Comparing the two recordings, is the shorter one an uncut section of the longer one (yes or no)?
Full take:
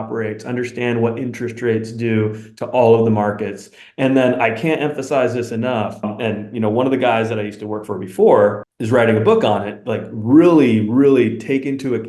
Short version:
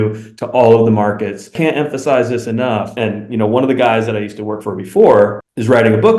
no